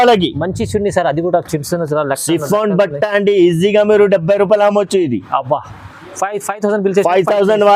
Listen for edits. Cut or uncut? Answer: uncut